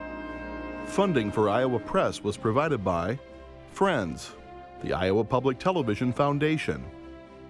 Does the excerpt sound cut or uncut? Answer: cut